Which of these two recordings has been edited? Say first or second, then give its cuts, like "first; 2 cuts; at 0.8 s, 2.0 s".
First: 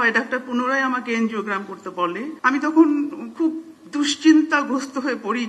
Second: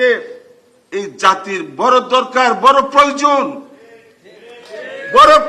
first; 1 cut; at 2.3 s